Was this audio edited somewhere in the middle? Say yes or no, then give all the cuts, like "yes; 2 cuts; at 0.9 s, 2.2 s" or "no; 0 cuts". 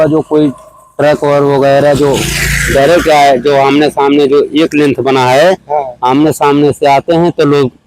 no; 0 cuts